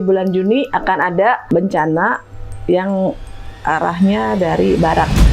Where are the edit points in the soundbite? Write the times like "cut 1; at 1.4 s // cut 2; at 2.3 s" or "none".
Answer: cut 1; at 1.5 s